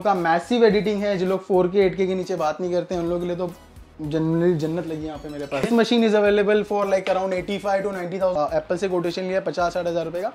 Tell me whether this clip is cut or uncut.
cut